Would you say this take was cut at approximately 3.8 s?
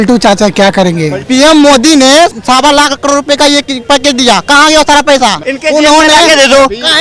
no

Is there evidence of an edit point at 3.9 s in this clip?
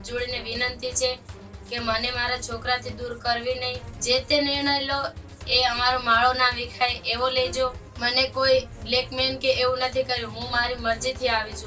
yes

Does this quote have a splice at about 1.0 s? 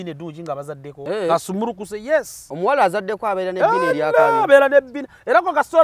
yes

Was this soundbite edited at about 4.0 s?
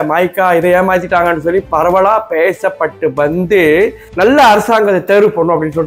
yes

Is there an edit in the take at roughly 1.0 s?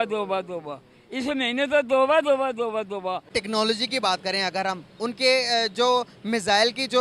no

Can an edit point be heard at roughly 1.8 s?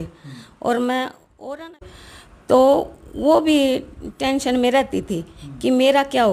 yes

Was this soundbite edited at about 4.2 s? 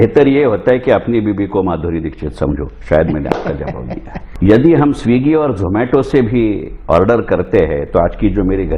yes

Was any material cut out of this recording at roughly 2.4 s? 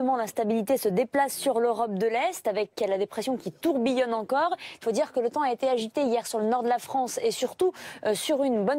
no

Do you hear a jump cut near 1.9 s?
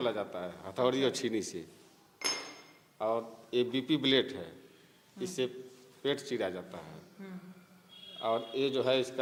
no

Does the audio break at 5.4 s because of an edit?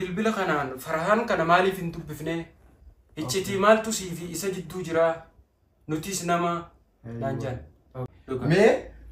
no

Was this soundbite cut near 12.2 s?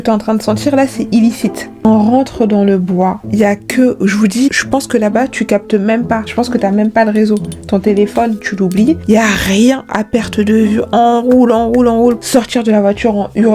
yes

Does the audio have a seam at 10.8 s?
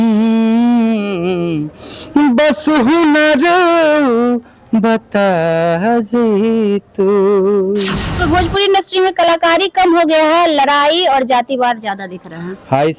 no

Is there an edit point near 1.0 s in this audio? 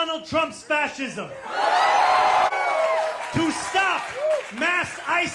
no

